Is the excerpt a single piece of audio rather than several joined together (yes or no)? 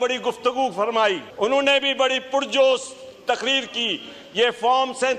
no